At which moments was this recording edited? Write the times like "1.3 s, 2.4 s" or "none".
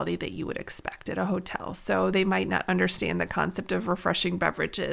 none

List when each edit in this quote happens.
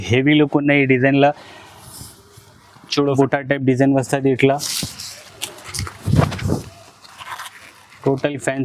3.2 s

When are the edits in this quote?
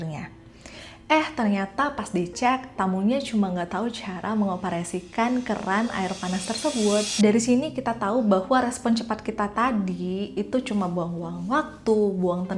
7.1 s

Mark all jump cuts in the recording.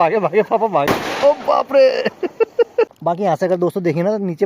2.9 s

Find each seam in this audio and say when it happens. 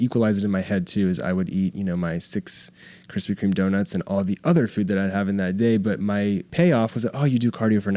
6.5 s

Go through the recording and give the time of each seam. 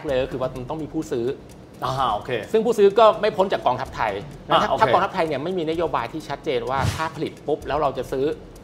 none

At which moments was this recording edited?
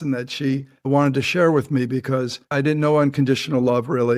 2.5 s

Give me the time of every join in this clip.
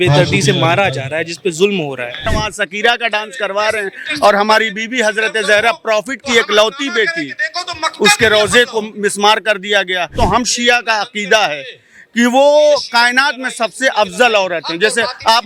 2.3 s, 10.1 s

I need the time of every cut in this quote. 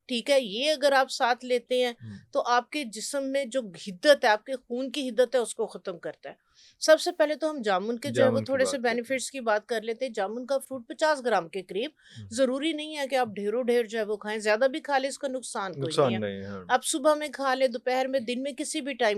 none

